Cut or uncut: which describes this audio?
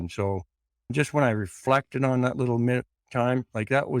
cut